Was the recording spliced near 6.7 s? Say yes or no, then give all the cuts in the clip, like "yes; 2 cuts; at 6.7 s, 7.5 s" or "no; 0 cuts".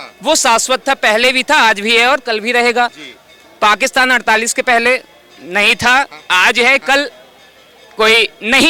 no; 0 cuts